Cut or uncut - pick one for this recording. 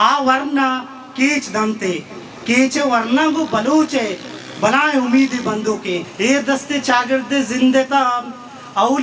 cut